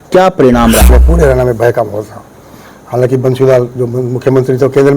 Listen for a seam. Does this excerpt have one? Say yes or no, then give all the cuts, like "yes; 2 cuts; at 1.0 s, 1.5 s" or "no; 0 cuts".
yes; 1 cut; at 1.0 s